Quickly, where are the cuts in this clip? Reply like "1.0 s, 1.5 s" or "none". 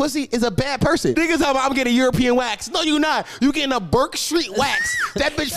1.1 s